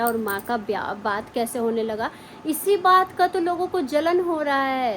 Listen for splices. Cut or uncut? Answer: uncut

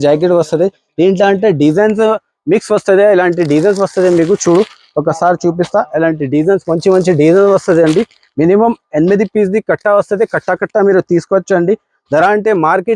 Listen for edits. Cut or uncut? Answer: uncut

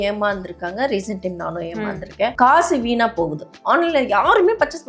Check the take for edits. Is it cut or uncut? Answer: cut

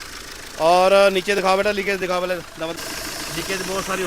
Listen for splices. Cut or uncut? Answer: cut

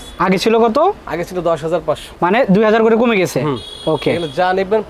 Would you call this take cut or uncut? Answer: uncut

